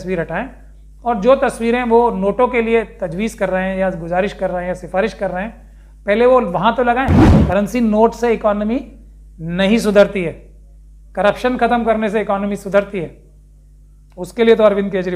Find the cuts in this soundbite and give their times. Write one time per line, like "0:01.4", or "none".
0:07.3